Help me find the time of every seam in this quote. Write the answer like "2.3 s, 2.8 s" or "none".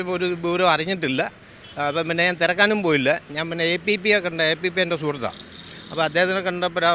none